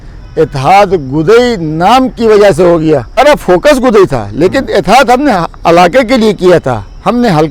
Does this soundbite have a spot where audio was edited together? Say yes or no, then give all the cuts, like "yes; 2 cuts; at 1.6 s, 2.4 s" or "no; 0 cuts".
yes; 1 cut; at 3.2 s